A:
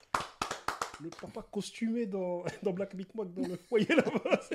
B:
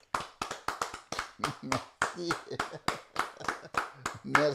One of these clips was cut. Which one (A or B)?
A